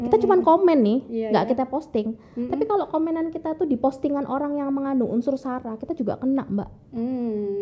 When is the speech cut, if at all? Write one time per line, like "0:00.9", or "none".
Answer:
none